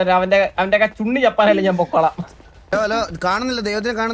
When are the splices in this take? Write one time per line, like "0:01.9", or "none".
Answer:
0:02.7